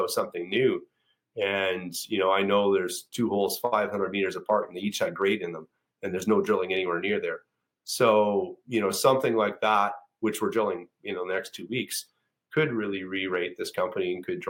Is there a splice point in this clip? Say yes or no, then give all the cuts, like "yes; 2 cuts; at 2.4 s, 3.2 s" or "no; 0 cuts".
no; 0 cuts